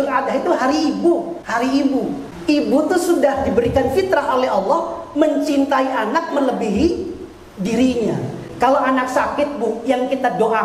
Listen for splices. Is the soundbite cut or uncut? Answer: cut